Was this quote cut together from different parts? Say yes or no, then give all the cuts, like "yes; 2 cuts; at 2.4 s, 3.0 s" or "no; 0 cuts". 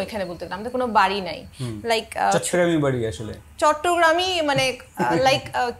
no; 0 cuts